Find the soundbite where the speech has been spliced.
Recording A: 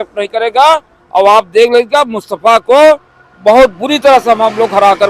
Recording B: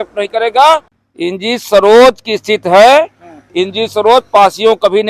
B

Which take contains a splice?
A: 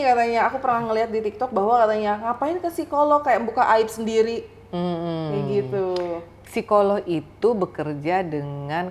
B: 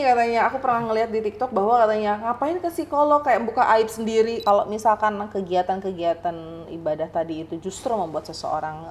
B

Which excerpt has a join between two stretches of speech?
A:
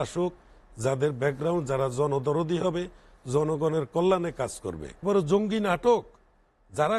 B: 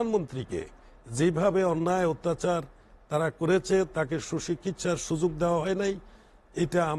A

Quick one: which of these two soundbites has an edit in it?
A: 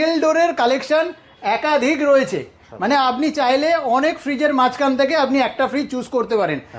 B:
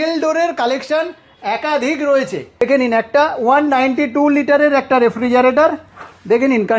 B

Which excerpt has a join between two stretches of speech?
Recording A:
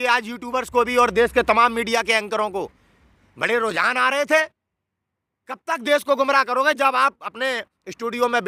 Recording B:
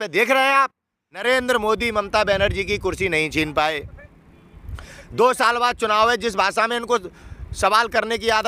B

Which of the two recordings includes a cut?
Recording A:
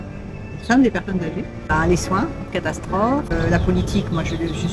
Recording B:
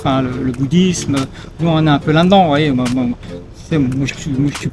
A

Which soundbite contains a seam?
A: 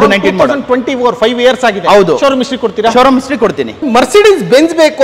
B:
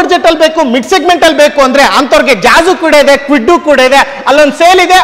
A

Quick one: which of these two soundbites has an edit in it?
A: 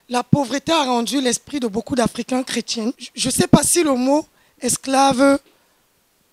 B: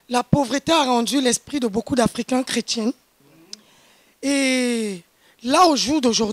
A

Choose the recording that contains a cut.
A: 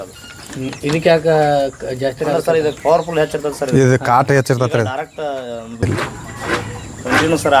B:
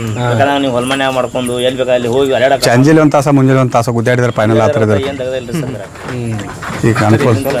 A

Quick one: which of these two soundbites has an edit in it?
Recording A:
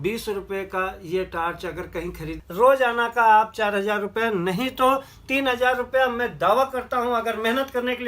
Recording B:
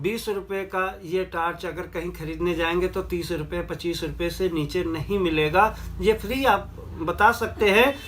A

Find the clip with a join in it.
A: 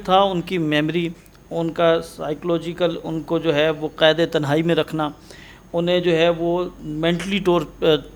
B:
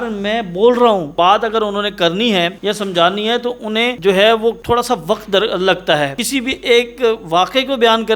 B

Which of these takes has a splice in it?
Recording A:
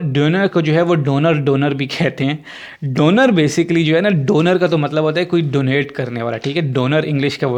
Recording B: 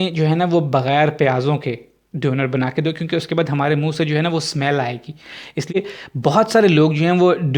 B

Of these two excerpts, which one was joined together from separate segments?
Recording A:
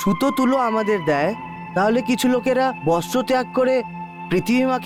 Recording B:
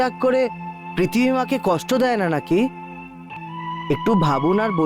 B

